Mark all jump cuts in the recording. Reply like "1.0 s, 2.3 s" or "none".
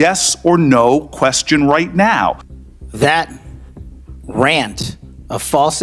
2.4 s